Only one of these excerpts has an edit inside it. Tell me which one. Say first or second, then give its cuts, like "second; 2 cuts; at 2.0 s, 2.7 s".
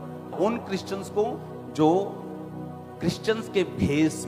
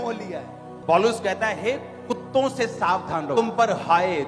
second; 1 cut; at 3.3 s